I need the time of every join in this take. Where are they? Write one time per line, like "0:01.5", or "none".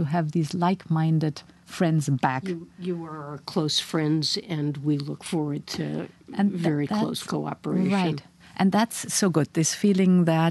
none